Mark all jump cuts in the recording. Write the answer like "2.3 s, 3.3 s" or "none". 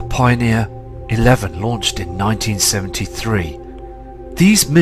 none